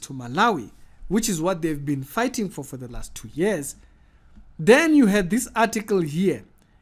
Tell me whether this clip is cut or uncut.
uncut